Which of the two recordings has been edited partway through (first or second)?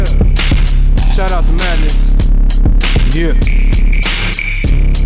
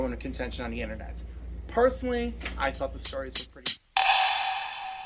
second